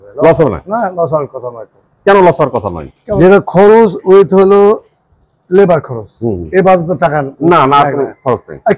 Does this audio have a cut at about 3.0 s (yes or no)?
yes